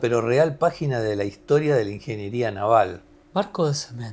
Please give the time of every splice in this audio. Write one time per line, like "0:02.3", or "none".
none